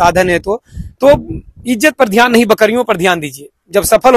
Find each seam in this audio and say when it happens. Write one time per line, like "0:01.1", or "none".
none